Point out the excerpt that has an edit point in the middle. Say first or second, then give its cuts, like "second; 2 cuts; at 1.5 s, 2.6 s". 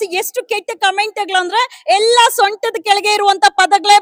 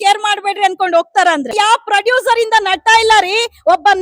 second; 1 cut; at 1.5 s